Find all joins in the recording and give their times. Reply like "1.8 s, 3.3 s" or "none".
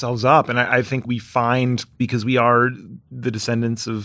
1.0 s